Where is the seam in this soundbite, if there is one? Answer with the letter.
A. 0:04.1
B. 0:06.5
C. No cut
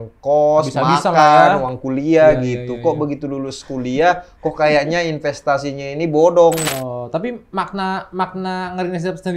B